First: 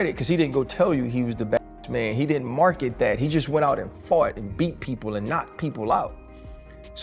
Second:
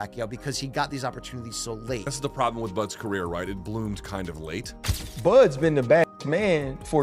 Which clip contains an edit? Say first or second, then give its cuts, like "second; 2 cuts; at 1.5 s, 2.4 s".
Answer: second; 1 cut; at 4.7 s